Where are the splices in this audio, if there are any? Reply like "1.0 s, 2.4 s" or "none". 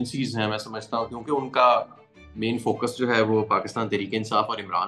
none